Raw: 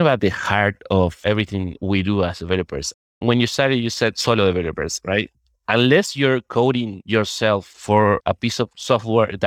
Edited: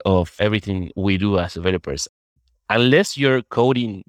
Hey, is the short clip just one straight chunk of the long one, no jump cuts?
no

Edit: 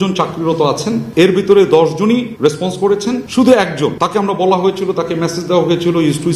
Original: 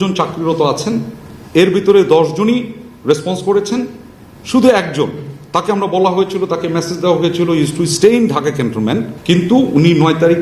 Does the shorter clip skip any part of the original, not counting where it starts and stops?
yes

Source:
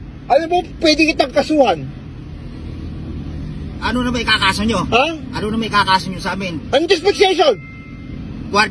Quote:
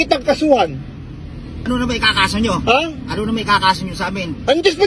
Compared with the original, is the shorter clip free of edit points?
no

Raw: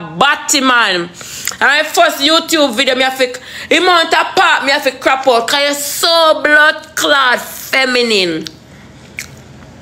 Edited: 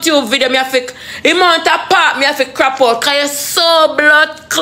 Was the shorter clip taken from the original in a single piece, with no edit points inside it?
yes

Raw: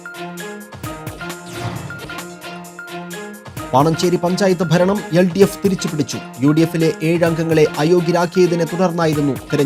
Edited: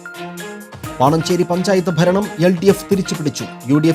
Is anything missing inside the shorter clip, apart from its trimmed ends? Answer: yes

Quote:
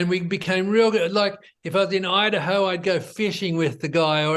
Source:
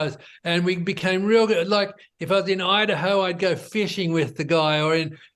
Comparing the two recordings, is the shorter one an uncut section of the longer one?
yes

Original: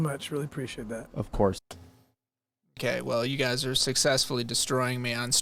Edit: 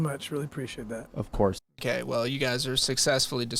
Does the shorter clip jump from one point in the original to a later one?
yes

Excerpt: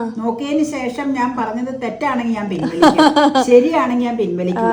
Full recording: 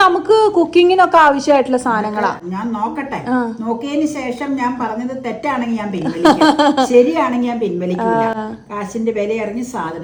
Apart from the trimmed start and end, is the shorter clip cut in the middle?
no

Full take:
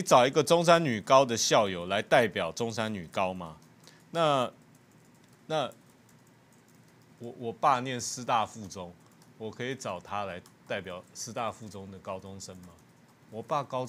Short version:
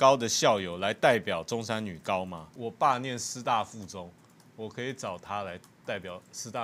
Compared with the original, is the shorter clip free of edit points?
no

